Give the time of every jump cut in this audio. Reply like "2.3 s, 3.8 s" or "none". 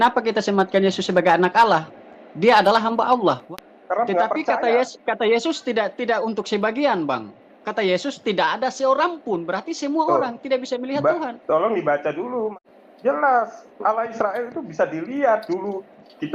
3.4 s, 12.5 s

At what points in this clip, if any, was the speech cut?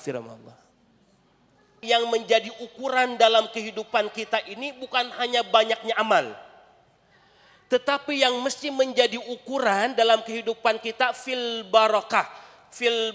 1.8 s

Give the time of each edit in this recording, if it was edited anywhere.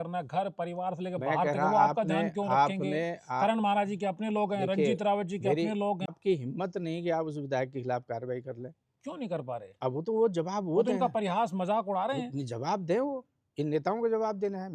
6.1 s

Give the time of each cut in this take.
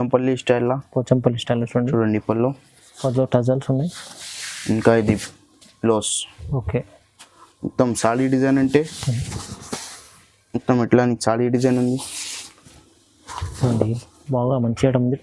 none

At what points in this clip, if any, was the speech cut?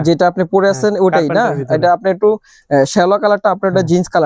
none

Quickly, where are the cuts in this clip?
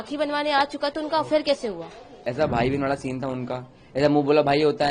2.2 s

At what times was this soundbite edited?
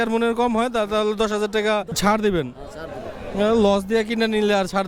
2.0 s

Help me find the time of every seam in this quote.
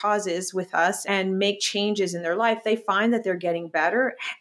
1.0 s

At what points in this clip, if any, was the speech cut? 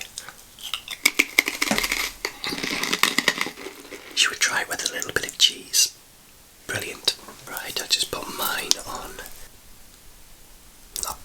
3.9 s, 7.3 s, 9.4 s

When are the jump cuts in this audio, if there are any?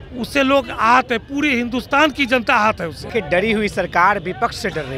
3.0 s

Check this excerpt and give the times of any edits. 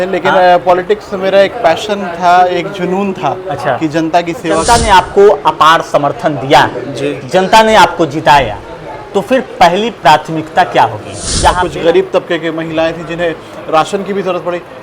4.6 s, 11.6 s

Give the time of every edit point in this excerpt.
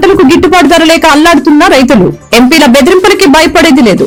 none

